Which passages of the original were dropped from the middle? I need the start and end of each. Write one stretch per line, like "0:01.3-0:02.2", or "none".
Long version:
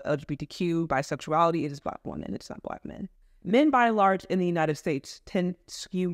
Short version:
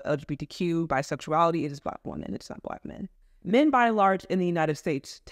none